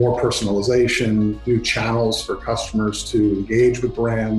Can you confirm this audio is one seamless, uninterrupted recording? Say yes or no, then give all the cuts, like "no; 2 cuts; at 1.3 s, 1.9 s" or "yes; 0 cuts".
yes; 0 cuts